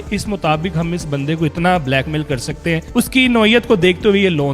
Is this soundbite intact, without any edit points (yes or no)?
no